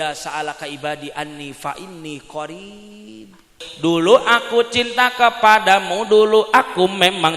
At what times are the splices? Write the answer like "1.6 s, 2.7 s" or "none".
3.6 s